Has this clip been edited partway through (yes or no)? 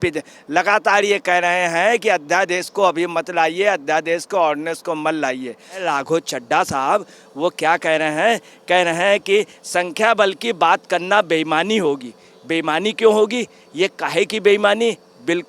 yes